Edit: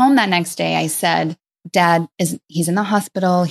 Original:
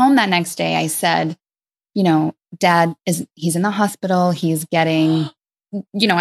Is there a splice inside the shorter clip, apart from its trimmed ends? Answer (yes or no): yes